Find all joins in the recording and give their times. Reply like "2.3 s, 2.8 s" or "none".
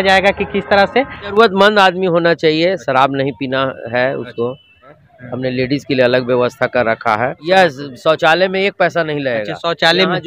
1.3 s, 5.1 s, 7.4 s